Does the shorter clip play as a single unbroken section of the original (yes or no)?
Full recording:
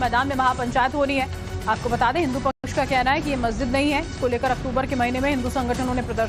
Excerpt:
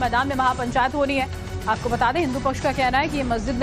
no